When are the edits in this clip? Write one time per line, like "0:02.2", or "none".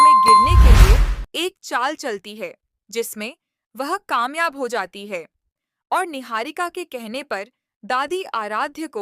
0:00.9